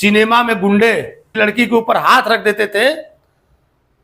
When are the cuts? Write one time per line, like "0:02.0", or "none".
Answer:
0:01.2